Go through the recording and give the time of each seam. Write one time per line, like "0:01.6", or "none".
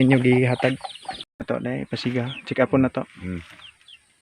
0:01.4

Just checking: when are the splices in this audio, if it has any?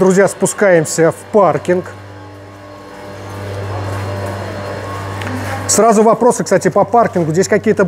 none

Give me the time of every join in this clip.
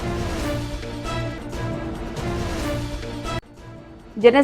none

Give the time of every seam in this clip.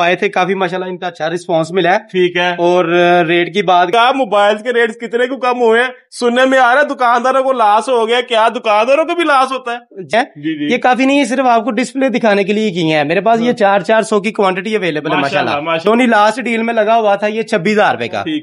0:03.9
0:10.1
0:15.8

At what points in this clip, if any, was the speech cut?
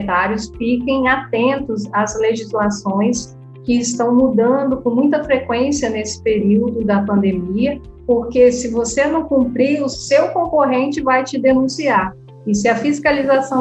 0:07.9

